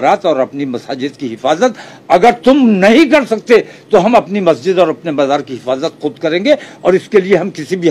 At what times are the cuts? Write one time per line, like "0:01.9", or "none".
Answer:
none

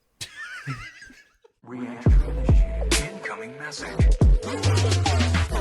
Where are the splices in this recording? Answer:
0:01.3

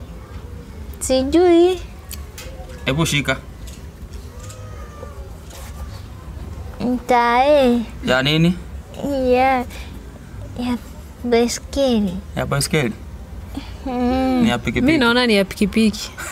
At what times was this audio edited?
none

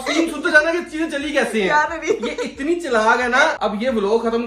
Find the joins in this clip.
0:03.6

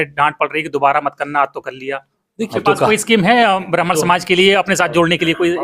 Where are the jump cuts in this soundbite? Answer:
0:02.5

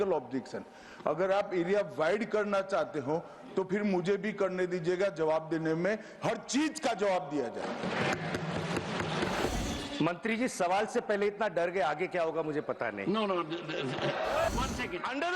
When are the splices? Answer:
0:09.5
0:14.5

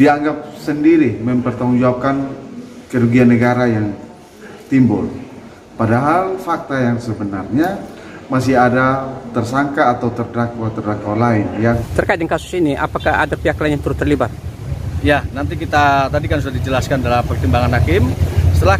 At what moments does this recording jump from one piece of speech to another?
0:11.9

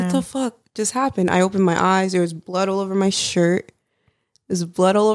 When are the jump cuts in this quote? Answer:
none

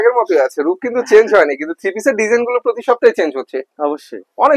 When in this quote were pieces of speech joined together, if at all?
none

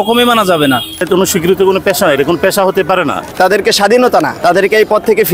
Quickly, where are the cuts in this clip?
0:01.0
0:03.3
0:04.3

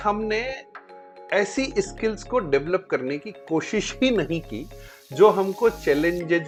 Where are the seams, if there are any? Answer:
none

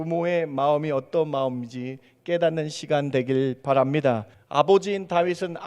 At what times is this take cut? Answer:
0:04.4

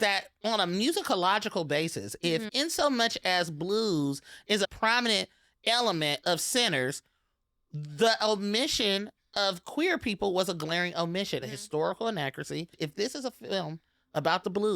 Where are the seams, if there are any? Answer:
0:04.7
0:11.4
0:12.7

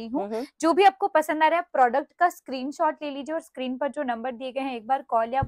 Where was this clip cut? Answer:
none

